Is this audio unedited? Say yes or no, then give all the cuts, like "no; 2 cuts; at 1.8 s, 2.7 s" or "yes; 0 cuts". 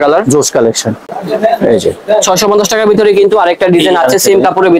no; 1 cut; at 1.2 s